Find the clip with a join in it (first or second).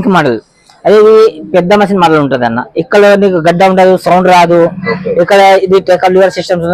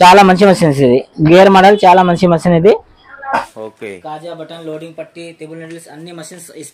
second